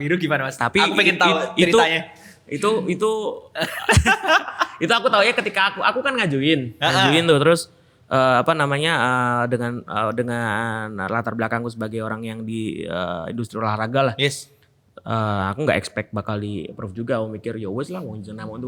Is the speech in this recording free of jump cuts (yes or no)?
yes